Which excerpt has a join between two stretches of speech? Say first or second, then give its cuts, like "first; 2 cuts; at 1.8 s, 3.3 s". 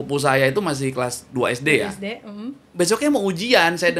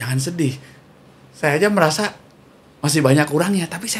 first; 1 cut; at 2.6 s